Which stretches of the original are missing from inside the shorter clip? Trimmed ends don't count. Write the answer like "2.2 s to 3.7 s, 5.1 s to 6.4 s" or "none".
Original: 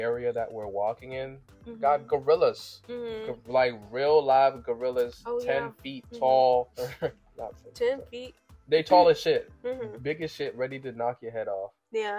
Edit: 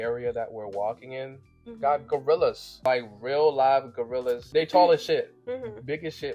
2.7 s to 3.4 s, 5.1 s to 8.6 s